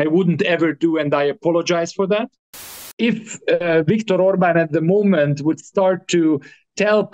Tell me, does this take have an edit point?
yes; 1 cut; at 2.8 s

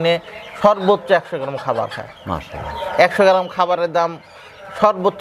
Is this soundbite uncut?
yes; 0 cuts

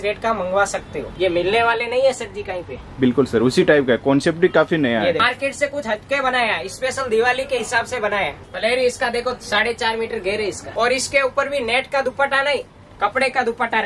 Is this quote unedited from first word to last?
no; 4 cuts; at 1.0 s, 5.2 s, 8.3 s, 10.6 s

